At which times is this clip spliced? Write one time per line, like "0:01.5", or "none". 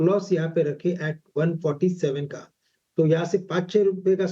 0:03.3

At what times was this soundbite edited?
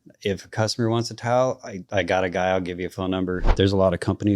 0:03.4

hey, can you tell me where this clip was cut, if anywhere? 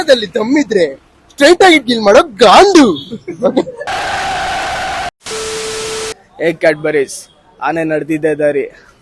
0:05.1
0:06.2

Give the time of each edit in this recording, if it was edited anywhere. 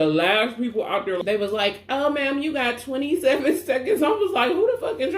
0:01.2

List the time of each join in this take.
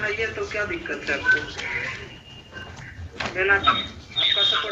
none

